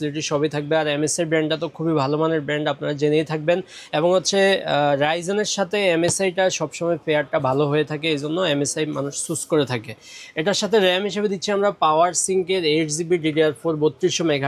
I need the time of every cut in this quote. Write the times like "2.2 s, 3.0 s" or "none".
none